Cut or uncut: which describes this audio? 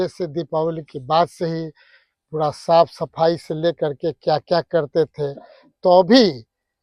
uncut